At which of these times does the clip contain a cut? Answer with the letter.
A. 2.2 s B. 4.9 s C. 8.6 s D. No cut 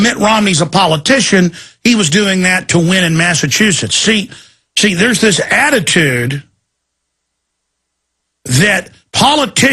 D